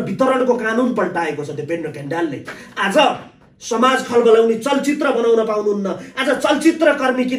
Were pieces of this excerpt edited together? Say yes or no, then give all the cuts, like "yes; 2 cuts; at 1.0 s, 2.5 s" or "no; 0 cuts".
no; 0 cuts